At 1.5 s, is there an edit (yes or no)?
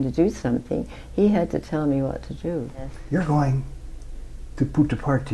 no